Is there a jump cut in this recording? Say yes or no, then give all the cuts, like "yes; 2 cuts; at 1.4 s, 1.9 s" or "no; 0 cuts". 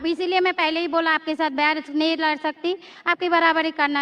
no; 0 cuts